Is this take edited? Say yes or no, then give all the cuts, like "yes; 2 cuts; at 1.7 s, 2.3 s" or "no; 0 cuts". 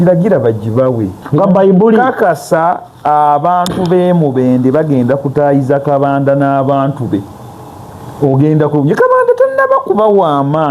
yes; 1 cut; at 1.1 s